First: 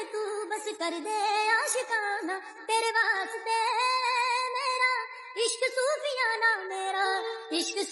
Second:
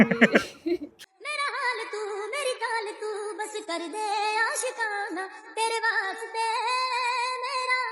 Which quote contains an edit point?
second; 1 cut; at 1.1 s

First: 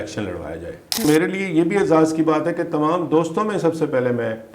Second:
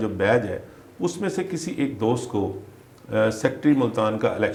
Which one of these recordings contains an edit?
first; 1 cut; at 1.0 s

